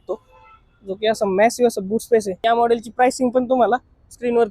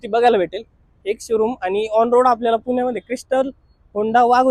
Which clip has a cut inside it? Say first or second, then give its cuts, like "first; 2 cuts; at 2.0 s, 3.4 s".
first; 1 cut; at 2.3 s